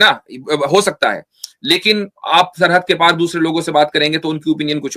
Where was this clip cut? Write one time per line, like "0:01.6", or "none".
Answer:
none